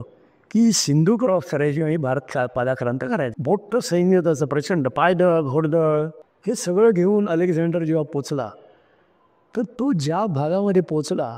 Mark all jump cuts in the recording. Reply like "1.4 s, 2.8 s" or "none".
none

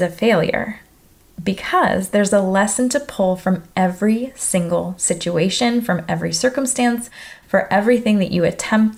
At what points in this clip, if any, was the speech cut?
none

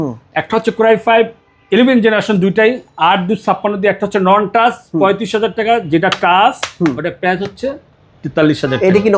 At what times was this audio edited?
none

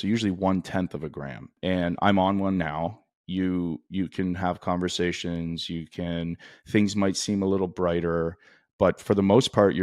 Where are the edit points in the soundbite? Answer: 1.6 s

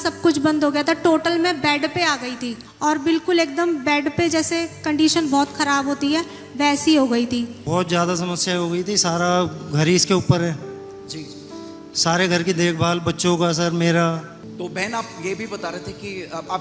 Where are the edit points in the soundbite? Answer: none

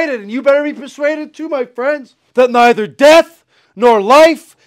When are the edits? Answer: 2.2 s

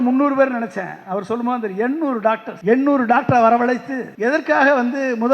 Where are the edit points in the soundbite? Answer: 2.5 s, 4.0 s

